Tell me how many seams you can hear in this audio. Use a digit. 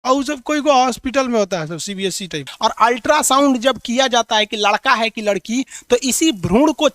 1